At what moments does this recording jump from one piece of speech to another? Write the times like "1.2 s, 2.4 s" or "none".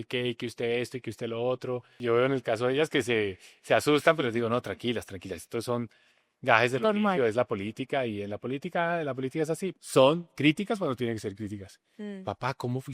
1.9 s, 9.8 s

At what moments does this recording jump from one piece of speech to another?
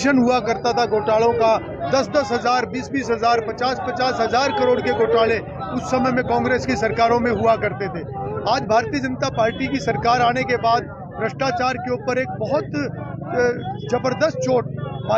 none

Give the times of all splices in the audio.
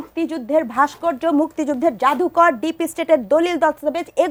none

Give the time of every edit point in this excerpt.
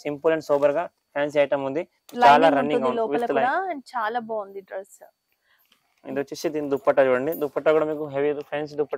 none

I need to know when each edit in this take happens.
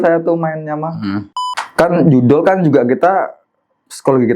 1.6 s

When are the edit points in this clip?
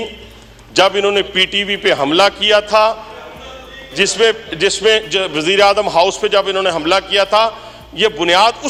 none

